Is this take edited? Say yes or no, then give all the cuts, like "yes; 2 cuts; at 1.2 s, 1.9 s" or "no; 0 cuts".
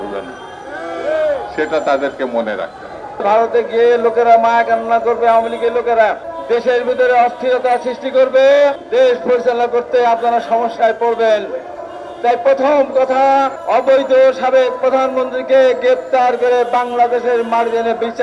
yes; 4 cuts; at 3.2 s, 6.3 s, 8.8 s, 13.6 s